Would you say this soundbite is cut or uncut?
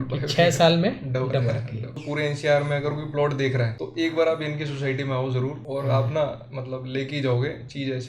cut